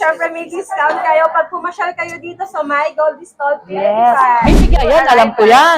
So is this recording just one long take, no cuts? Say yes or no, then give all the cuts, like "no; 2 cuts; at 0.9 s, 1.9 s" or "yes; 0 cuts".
no; 1 cut; at 4.7 s